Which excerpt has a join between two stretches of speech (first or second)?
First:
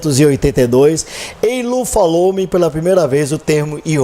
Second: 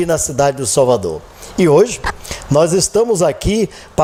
first